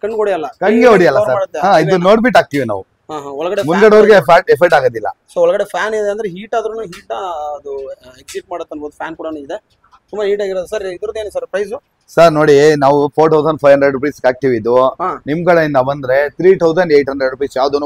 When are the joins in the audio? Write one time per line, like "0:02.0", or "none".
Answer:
none